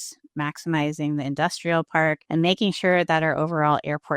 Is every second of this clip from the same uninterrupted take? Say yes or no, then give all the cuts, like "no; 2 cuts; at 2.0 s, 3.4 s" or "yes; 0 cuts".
no; 1 cut; at 2.2 s